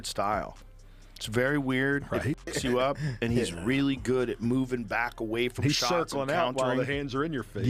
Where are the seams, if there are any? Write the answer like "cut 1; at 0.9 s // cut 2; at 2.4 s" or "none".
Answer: none